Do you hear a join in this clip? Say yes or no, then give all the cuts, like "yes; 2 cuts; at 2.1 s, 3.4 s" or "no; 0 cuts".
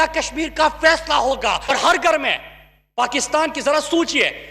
yes; 1 cut; at 1.7 s